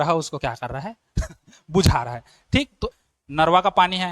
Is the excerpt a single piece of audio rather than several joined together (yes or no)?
no